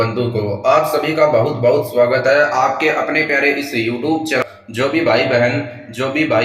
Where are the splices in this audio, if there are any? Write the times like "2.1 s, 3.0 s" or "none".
4.4 s